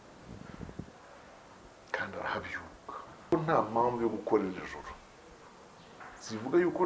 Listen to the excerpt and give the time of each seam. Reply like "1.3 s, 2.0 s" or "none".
3.3 s